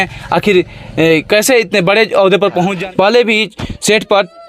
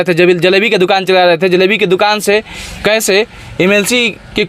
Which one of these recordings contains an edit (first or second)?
first